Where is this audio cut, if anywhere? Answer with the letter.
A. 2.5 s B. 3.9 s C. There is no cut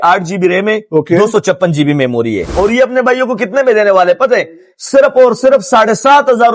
A